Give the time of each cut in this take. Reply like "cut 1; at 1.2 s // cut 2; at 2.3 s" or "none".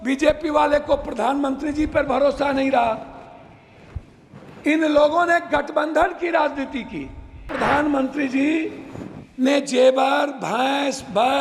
cut 1; at 7.5 s